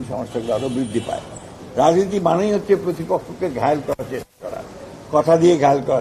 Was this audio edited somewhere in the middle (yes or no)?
yes